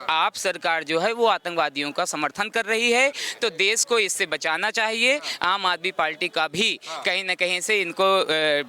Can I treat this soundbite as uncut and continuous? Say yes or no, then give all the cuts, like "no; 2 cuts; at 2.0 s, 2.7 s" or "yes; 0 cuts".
yes; 0 cuts